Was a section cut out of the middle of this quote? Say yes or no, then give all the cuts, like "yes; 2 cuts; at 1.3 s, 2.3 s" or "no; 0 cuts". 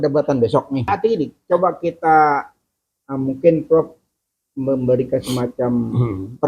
yes; 1 cut; at 0.9 s